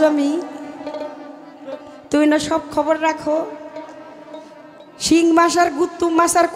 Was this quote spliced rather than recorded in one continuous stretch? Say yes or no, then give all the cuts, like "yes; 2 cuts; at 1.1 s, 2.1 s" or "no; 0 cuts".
no; 0 cuts